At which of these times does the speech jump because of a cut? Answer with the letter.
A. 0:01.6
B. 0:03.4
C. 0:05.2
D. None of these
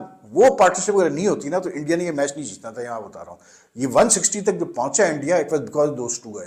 D